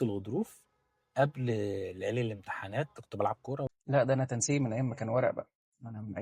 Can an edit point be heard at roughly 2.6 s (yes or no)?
no